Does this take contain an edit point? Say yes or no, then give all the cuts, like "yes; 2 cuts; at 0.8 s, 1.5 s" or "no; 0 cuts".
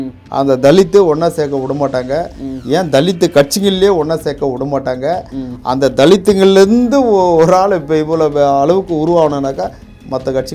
no; 0 cuts